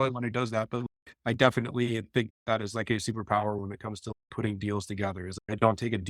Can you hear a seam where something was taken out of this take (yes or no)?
yes